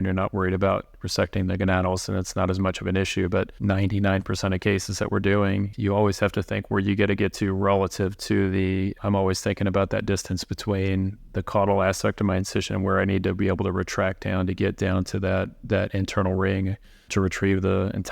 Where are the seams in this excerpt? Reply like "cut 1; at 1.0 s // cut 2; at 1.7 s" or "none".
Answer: cut 1; at 3.5 s // cut 2; at 5.7 s // cut 3; at 8.9 s // cut 4; at 11.2 s